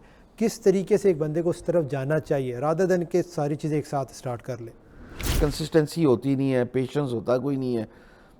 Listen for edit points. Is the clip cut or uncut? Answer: cut